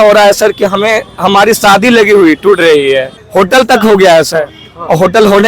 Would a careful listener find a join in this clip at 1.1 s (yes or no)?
no